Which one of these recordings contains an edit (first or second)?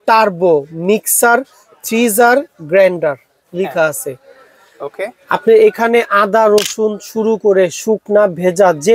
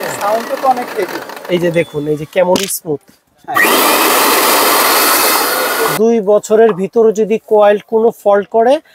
second